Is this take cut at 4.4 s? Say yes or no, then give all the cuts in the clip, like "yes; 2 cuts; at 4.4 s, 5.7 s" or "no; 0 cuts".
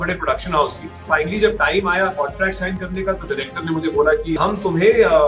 yes; 2 cuts; at 1.1 s, 4.4 s